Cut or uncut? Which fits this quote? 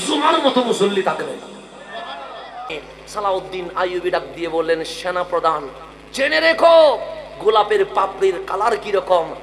cut